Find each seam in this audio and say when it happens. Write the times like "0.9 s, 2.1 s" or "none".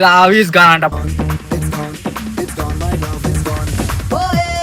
0.9 s